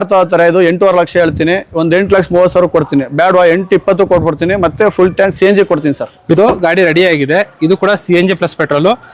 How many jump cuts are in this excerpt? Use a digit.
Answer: 1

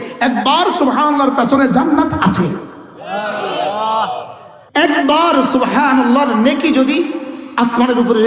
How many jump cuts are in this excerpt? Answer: 0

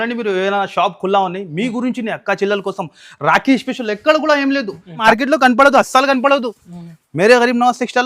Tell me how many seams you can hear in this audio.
1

